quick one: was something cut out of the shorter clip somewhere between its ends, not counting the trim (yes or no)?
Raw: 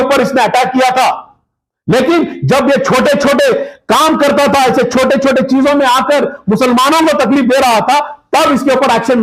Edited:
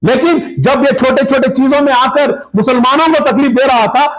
yes